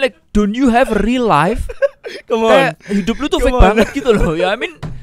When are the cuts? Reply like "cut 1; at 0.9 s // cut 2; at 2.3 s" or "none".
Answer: none